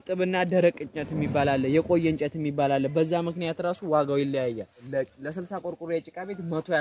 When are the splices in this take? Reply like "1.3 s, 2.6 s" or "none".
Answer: 4.9 s